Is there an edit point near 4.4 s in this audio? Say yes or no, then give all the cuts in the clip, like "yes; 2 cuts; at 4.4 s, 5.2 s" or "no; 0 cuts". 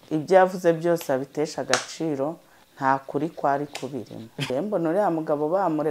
yes; 1 cut; at 4.4 s